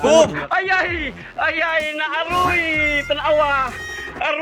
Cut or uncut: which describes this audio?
cut